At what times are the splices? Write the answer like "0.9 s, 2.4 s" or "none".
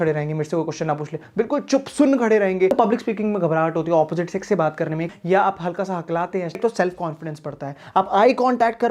2.7 s, 5.1 s, 6.6 s